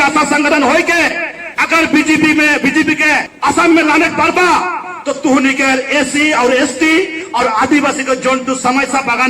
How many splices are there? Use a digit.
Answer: 1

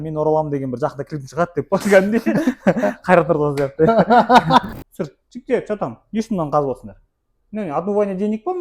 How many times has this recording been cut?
1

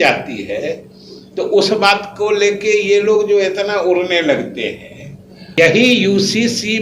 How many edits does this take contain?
1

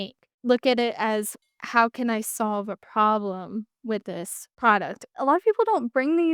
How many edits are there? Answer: 1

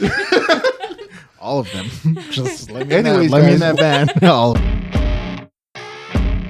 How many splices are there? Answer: 1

